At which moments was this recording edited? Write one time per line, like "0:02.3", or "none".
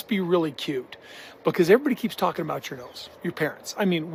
none